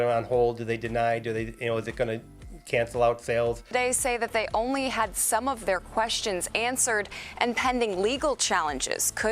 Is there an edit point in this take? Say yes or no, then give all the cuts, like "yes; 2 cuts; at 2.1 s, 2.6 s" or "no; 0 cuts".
yes; 1 cut; at 3.6 s